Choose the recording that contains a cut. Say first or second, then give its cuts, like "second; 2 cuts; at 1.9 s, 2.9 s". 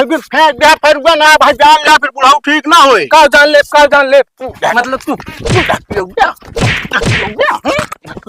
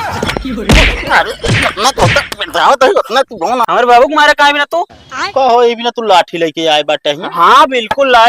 second; 1 cut; at 3.6 s